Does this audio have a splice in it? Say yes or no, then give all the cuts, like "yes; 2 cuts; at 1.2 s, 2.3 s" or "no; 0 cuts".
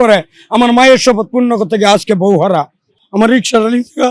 no; 0 cuts